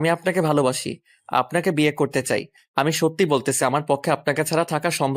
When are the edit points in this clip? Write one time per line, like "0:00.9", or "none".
0:02.6